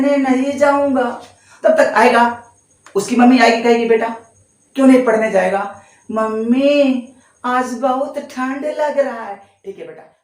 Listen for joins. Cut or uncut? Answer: uncut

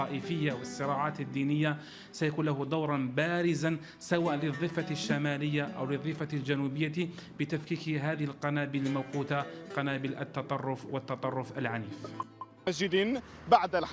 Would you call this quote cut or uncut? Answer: uncut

